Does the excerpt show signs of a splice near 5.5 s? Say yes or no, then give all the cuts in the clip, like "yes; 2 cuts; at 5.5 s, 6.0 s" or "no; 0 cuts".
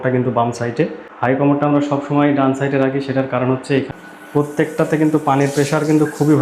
no; 2 cuts; at 1.0 s, 3.9 s